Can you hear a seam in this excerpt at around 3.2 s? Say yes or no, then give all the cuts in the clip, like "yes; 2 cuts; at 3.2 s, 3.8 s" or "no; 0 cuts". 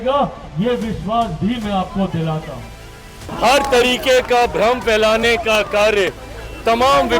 yes; 1 cut; at 3.2 s